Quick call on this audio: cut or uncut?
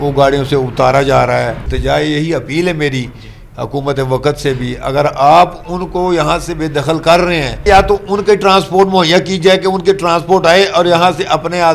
cut